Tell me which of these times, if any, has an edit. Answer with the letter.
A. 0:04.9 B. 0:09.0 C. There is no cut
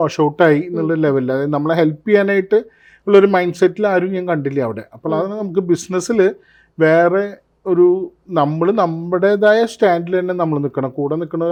C